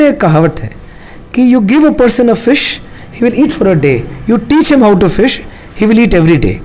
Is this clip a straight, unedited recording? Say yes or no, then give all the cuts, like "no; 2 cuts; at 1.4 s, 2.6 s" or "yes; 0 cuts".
yes; 0 cuts